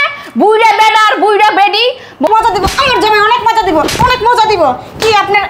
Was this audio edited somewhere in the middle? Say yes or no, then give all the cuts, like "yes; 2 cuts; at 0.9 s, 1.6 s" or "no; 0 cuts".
yes; 1 cut; at 2.3 s